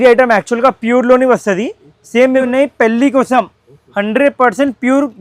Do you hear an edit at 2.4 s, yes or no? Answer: yes